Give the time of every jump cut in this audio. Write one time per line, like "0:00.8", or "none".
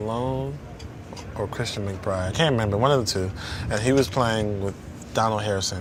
none